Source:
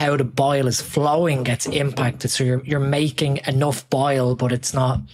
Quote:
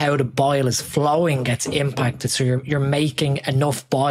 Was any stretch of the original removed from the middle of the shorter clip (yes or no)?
no